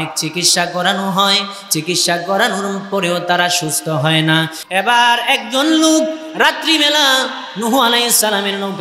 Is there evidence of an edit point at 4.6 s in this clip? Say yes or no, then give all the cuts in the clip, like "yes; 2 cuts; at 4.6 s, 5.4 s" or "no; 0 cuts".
yes; 1 cut; at 4.6 s